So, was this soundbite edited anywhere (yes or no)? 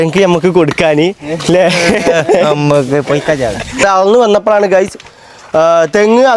yes